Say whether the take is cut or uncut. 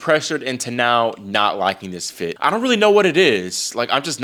uncut